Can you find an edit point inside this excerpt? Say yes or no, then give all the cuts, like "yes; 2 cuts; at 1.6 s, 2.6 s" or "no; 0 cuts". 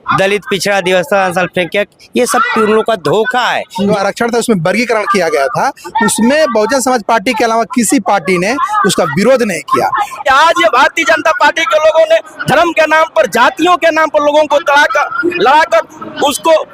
yes; 2 cuts; at 3.9 s, 10.2 s